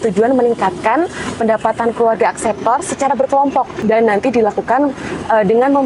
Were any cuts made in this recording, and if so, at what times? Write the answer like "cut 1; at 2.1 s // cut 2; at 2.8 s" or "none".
cut 1; at 3.7 s

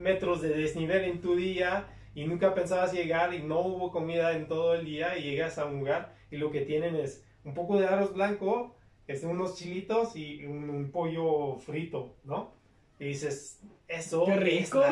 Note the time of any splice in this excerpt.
none

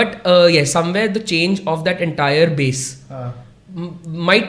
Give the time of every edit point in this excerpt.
none

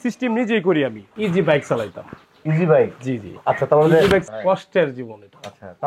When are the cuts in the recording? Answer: cut 1; at 1.1 s // cut 2; at 4.3 s

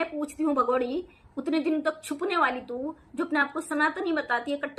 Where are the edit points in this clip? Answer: none

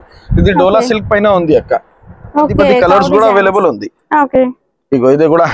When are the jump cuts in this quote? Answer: cut 1; at 2.8 s

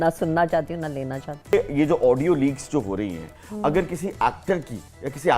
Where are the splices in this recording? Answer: cut 1; at 1.5 s

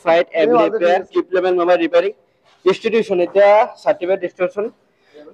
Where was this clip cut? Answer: none

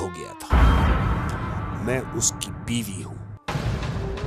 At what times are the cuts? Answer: cut 1; at 1.6 s

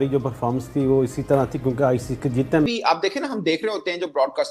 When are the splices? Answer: cut 1; at 2.7 s

